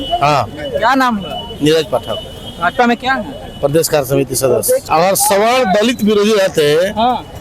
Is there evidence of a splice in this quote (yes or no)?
yes